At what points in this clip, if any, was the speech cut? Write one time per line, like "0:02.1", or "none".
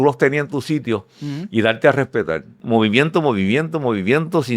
0:02.6